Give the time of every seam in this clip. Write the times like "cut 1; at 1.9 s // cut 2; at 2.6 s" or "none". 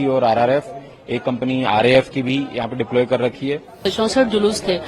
cut 1; at 3.8 s